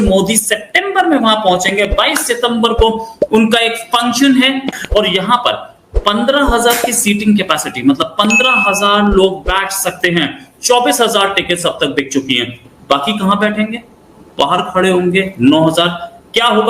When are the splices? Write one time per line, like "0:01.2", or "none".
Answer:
0:04.7